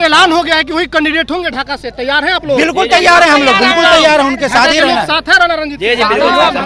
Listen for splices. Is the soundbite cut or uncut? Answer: uncut